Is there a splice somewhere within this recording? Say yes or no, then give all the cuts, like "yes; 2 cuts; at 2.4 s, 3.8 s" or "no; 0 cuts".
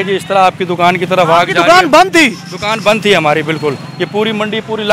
no; 0 cuts